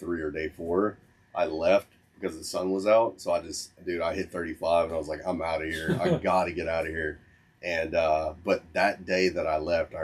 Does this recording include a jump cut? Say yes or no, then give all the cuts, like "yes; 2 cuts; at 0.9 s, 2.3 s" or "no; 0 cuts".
no; 0 cuts